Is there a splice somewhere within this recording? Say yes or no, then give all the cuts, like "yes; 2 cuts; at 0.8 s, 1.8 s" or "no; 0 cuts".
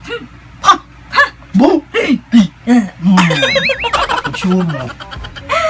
no; 0 cuts